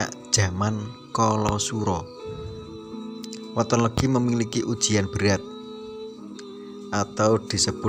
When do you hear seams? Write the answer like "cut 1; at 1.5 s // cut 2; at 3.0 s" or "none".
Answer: cut 1; at 2.0 s // cut 2; at 3.5 s // cut 3; at 5.4 s // cut 4; at 6.9 s